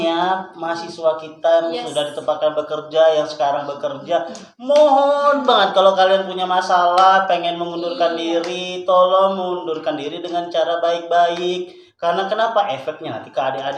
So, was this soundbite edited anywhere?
no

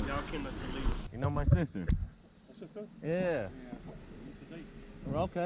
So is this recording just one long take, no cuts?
no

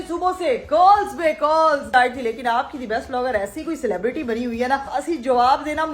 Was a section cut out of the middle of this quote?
yes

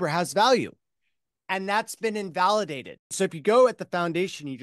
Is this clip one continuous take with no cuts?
no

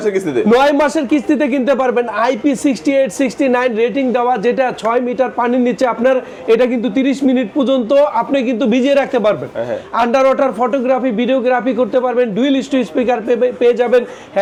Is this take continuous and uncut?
yes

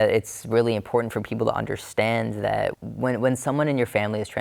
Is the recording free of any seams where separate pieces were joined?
no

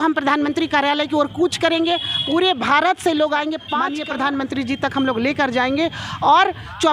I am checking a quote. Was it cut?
yes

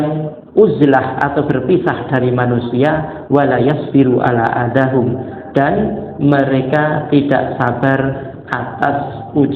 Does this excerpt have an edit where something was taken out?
no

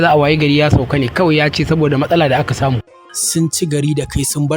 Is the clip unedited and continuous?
no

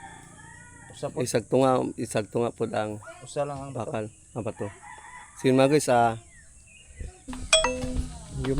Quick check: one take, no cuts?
no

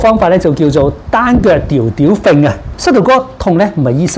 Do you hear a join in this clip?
yes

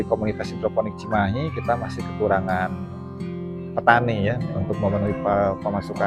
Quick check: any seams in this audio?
no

